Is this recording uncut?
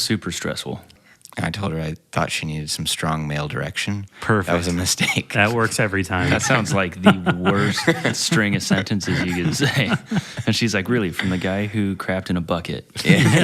no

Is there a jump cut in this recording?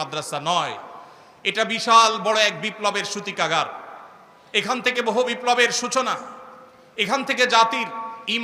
no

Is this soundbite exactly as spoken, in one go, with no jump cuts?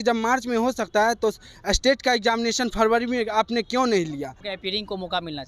no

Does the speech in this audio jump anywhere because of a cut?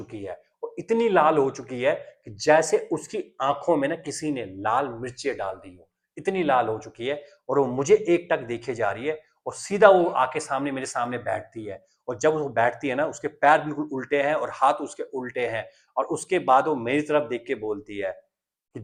no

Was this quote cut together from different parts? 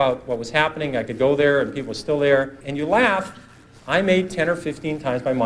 yes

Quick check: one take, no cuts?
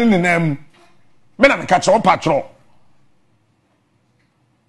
yes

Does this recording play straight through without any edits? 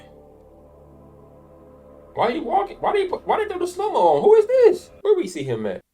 no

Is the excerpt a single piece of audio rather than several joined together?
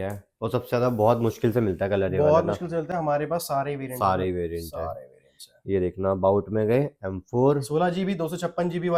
yes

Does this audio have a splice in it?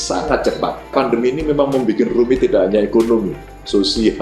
yes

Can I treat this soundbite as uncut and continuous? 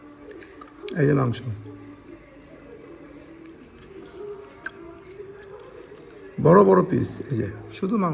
yes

